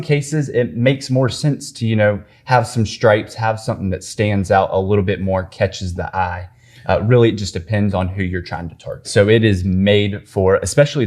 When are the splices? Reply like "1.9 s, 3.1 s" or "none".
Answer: 9.0 s